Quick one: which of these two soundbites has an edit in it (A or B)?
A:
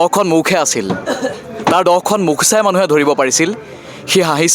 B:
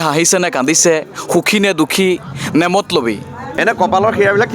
B